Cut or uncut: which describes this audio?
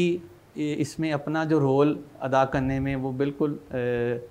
uncut